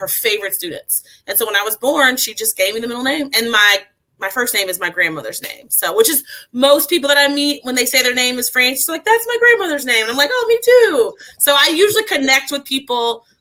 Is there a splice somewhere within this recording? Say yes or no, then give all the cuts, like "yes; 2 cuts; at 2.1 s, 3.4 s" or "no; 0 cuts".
no; 0 cuts